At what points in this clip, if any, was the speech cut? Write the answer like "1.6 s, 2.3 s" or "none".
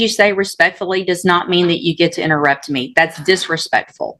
none